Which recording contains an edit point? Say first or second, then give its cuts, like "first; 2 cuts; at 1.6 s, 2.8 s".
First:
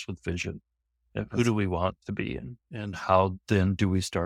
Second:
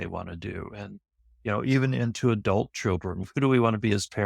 second; 1 cut; at 3.3 s